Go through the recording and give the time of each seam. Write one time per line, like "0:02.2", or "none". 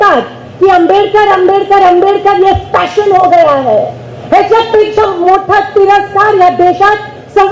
none